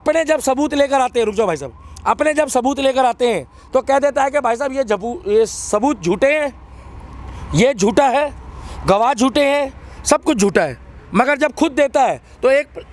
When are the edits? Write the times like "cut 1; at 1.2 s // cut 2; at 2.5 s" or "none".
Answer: none